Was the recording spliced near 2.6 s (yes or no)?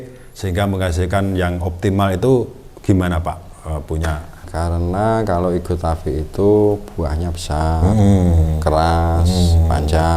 no